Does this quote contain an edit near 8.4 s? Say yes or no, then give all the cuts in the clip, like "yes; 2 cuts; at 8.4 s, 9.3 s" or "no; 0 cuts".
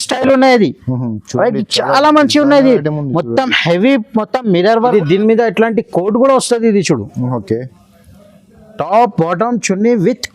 no; 1 cut; at 4.8 s